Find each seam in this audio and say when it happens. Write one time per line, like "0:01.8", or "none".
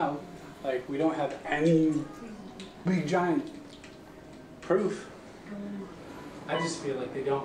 0:06.0